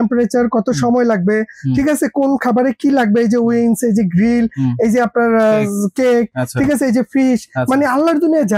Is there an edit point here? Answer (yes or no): no